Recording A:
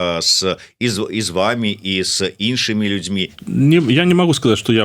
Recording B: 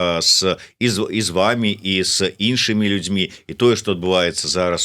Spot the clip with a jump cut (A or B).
A